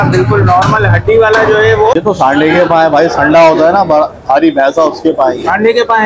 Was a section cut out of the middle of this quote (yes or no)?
yes